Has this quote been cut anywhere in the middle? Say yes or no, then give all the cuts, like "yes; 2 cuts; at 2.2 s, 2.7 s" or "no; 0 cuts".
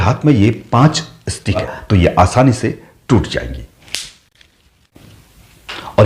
yes; 2 cuts; at 1.7 s, 4.7 s